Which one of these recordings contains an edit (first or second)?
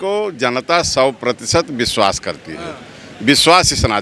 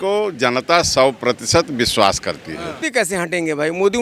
second